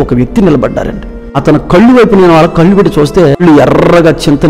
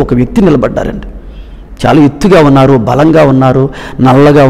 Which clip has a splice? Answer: first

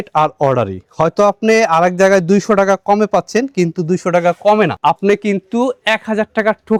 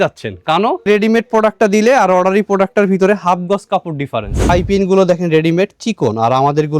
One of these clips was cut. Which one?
second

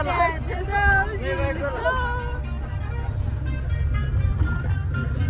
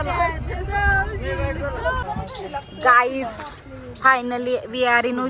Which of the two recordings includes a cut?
second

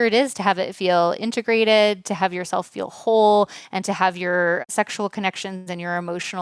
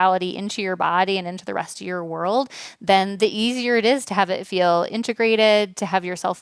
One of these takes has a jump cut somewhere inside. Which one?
first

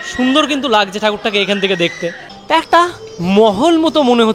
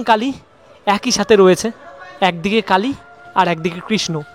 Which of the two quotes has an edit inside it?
first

